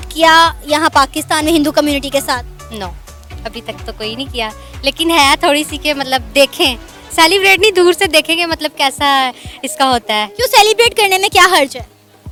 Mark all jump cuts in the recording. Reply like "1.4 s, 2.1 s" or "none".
none